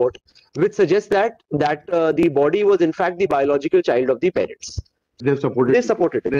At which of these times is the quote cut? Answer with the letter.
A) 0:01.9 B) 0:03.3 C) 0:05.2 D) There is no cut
C